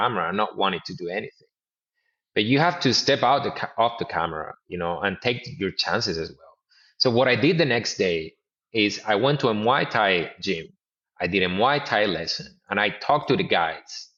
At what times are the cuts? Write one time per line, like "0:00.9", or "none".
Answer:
none